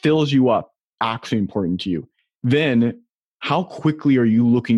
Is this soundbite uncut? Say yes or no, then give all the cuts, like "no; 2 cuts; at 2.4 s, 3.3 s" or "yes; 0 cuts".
no; 1 cut; at 2.1 s